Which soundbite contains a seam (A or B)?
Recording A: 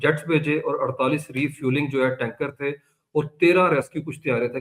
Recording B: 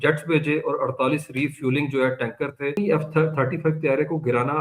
B